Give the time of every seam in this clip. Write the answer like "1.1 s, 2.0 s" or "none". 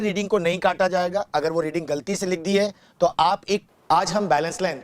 3.6 s